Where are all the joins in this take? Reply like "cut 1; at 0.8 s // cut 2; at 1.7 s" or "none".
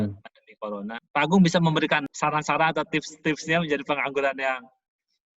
cut 1; at 1.0 s // cut 2; at 2.1 s